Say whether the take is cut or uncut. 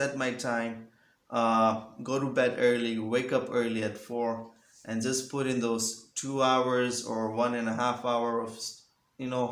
uncut